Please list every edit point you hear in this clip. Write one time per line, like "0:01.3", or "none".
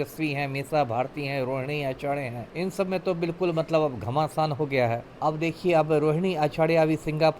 0:02.4
0:05.1